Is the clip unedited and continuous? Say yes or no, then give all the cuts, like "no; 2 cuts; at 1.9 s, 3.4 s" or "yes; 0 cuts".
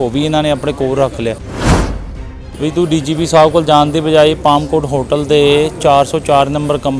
no; 1 cut; at 2.0 s